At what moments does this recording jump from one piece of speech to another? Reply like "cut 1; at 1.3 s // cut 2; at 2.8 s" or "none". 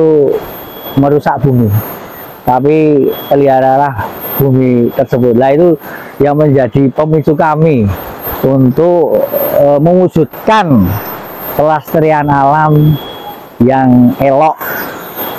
none